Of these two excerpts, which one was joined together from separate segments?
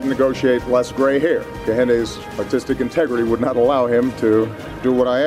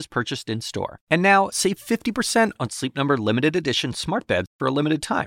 first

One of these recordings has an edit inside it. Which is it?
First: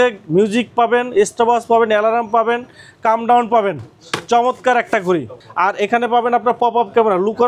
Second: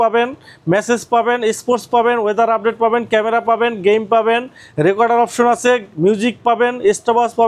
first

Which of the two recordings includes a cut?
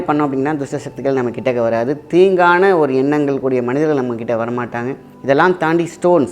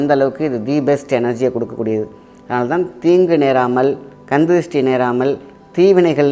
first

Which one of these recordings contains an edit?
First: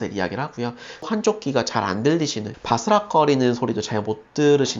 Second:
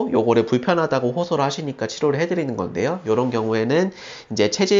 first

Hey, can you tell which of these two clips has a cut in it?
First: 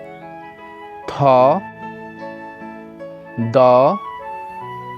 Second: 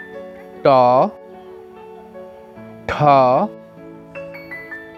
first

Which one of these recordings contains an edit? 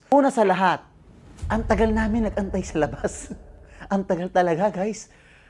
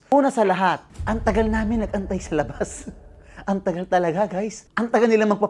second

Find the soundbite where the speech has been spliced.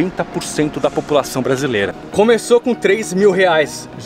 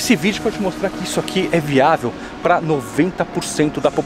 first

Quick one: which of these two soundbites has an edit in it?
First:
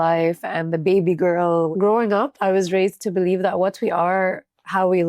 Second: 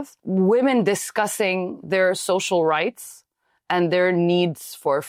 first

